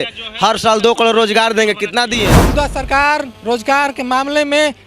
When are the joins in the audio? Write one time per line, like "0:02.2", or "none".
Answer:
0:02.4